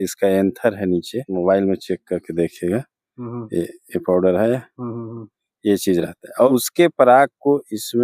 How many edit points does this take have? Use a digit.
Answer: 2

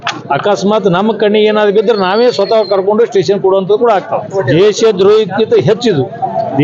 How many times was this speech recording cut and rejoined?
1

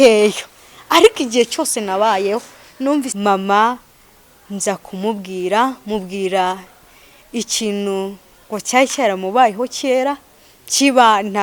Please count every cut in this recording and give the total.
1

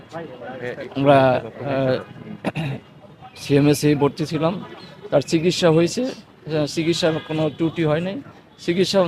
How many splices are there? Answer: 0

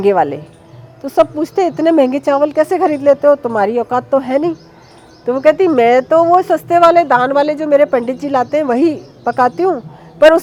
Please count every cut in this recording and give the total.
0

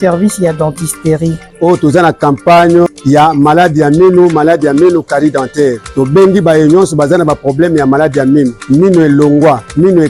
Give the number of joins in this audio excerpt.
0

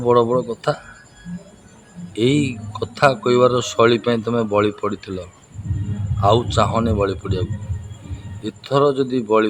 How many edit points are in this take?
0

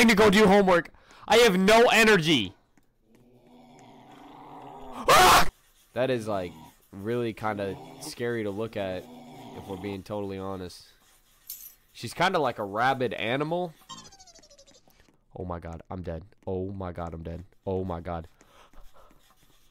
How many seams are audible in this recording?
2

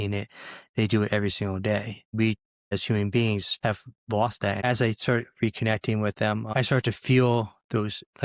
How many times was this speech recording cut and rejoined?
4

